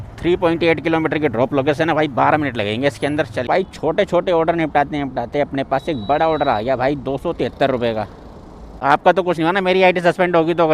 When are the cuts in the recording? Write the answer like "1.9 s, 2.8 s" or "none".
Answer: 3.4 s, 8.8 s